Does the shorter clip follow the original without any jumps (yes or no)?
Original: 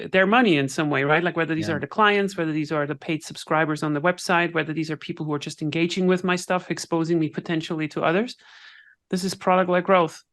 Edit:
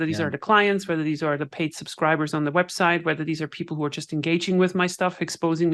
yes